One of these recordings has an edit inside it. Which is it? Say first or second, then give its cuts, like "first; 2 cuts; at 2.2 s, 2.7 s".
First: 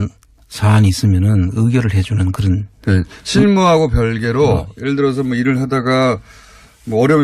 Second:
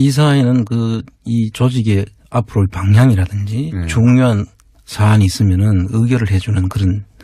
second; 1 cut; at 3.4 s